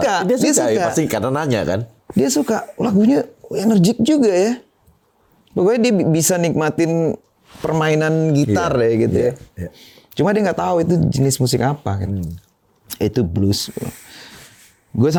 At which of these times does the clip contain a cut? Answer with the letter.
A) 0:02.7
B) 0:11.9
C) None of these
C